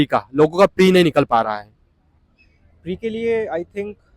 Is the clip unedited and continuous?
yes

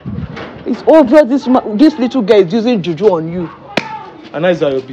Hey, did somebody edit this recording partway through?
no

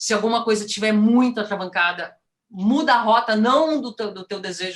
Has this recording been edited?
no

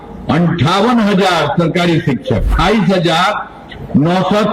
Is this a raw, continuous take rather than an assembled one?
no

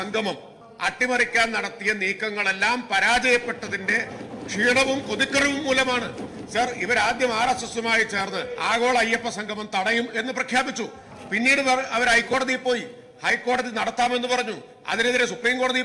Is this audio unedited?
yes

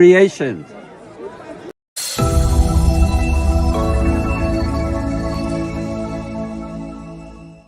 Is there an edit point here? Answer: yes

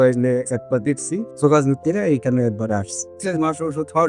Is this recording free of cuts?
no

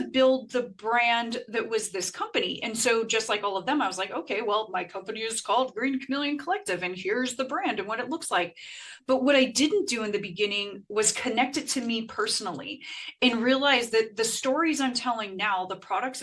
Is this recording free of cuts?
yes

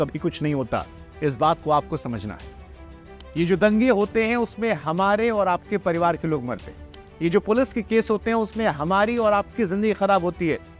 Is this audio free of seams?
yes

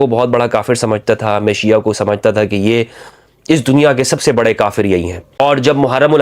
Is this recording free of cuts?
no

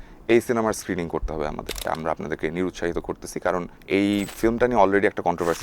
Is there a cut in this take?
yes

